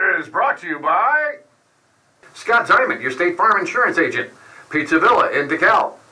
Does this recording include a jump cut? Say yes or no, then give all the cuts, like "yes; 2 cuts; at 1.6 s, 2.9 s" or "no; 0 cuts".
yes; 1 cut; at 2.3 s